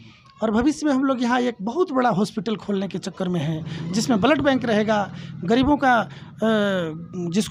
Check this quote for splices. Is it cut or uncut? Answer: uncut